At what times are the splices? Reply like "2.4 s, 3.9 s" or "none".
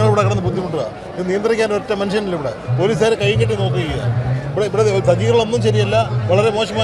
none